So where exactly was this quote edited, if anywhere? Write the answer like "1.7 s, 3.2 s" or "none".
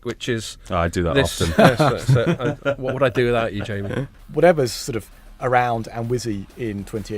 4.2 s